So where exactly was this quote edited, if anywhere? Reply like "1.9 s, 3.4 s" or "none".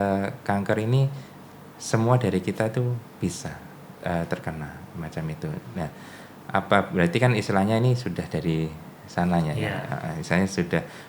none